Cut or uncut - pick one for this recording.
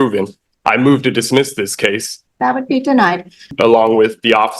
cut